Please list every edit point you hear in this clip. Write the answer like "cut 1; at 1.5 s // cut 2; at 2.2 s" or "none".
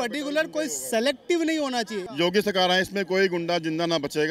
cut 1; at 2.0 s